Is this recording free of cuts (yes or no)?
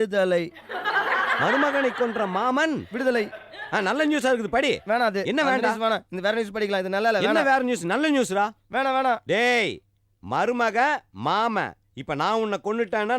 yes